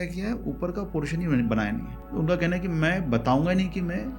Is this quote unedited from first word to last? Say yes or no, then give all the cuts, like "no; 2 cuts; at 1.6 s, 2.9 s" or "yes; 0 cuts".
no; 1 cut; at 2.0 s